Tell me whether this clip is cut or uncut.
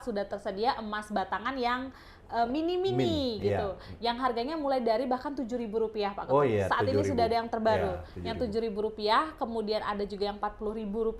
uncut